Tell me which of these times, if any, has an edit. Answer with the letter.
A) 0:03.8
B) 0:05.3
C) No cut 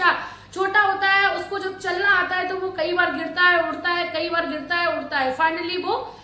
C